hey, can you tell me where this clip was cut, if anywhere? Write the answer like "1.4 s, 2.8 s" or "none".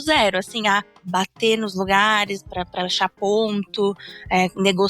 1.0 s